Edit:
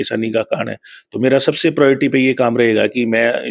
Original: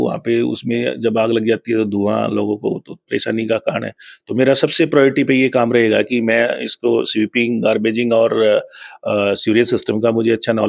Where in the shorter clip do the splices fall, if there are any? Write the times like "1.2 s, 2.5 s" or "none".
none